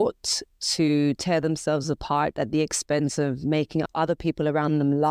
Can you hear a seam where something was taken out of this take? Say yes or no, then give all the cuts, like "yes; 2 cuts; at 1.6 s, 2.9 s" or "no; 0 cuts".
yes; 1 cut; at 3.9 s